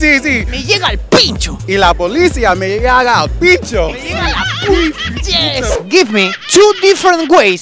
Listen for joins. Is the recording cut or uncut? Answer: cut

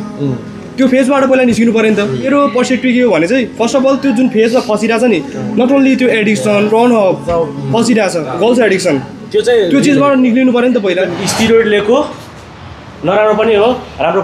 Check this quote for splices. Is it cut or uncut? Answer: cut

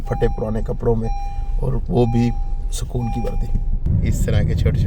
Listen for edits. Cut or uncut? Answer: cut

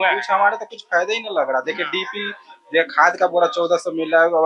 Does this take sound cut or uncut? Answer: uncut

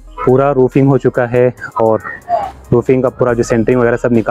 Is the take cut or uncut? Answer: uncut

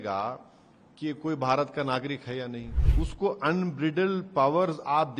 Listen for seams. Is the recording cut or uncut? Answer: cut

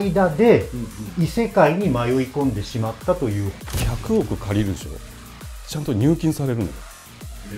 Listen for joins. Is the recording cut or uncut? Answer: cut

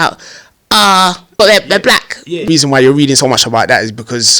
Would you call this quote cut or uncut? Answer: cut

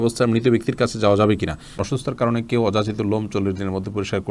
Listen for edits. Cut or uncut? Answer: cut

